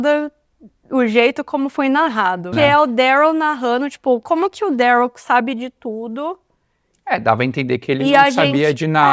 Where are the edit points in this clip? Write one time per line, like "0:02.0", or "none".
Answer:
0:02.5